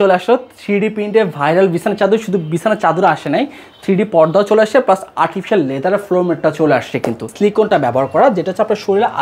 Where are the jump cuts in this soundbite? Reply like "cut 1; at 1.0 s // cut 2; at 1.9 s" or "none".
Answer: cut 1; at 7.3 s